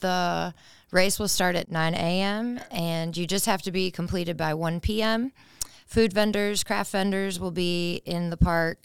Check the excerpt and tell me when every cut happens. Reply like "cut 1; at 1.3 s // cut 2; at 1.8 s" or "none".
cut 1; at 1.7 s